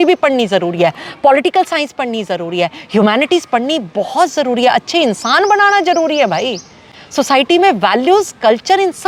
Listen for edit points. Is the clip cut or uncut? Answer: uncut